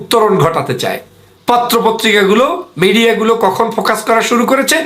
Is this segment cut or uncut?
cut